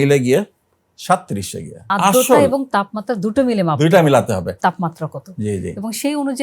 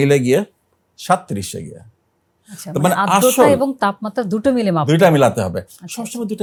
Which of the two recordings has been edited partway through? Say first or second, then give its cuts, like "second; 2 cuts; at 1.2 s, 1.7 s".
first; 2 cuts; at 1.9 s, 4.6 s